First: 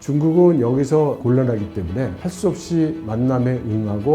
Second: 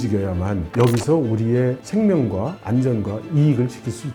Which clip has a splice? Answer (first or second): first